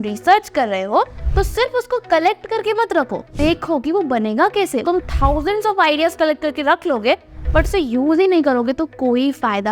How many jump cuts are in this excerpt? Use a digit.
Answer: 2